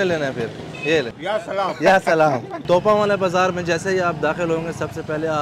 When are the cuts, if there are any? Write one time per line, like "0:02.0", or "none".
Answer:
0:01.2
0:02.6